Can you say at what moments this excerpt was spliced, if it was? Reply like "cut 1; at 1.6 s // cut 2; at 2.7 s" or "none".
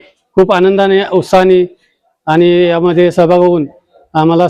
none